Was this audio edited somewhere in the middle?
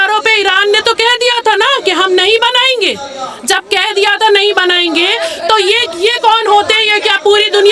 no; 0 cuts

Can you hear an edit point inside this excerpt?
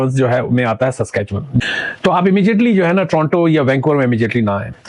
yes; 1 cut; at 1.6 s

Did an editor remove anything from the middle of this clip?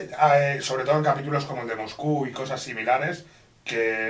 no; 0 cuts

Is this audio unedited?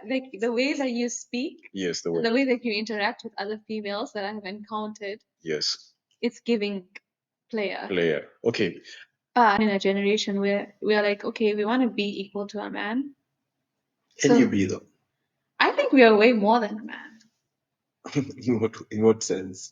no; 1 cut; at 9.6 s

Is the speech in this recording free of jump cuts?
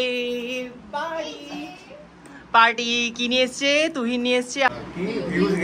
no; 1 cut; at 4.7 s

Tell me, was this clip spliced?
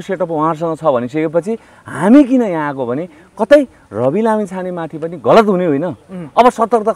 no; 0 cuts

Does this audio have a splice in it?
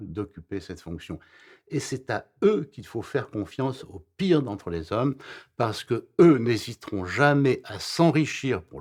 no; 0 cuts

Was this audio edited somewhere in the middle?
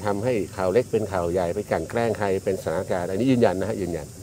no; 0 cuts

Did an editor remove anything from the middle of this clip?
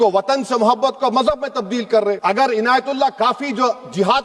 yes; 1 cut; at 2.2 s

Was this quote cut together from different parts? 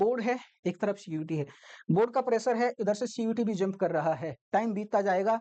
no; 0 cuts

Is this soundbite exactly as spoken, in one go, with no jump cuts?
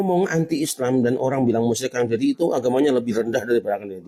yes; 0 cuts

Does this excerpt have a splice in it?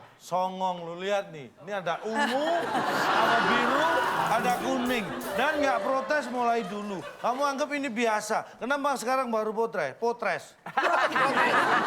no; 0 cuts

